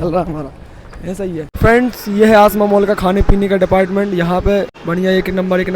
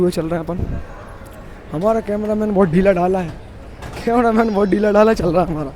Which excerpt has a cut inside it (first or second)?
first